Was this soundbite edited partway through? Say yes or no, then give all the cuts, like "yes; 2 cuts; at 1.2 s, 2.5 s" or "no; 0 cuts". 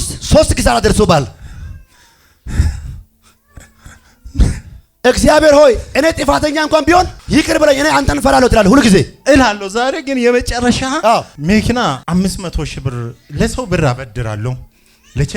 yes; 3 cuts; at 7.2 s, 11.1 s, 12.0 s